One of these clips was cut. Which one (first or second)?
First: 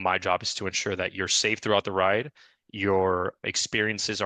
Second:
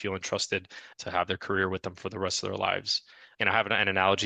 second